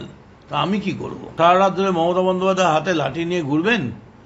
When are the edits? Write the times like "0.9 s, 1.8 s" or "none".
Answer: 1.2 s